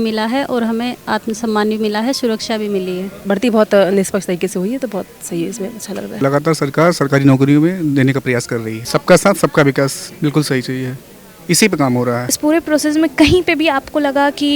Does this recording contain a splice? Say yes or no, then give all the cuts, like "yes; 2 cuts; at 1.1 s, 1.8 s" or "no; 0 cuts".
yes; 4 cuts; at 3.2 s, 6.1 s, 8.8 s, 12.2 s